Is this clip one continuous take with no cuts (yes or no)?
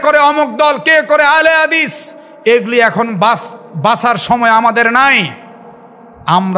yes